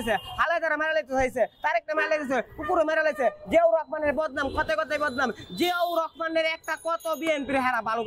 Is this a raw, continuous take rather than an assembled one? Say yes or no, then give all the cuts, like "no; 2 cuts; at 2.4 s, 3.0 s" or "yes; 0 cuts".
yes; 0 cuts